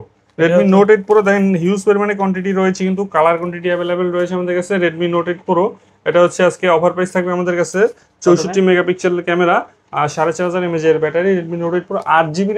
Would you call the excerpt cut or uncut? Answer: uncut